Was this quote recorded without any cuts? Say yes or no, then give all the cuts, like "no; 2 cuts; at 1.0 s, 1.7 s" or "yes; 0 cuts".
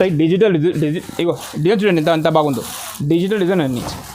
yes; 0 cuts